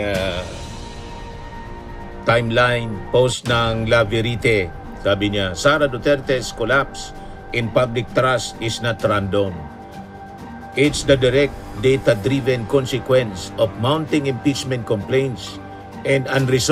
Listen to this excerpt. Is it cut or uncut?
uncut